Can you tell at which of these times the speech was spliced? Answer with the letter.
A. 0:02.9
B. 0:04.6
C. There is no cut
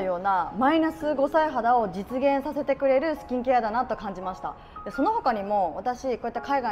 C